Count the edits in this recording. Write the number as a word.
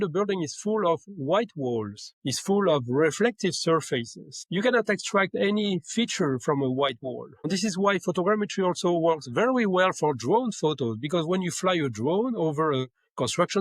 one